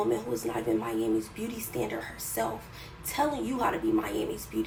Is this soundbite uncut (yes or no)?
yes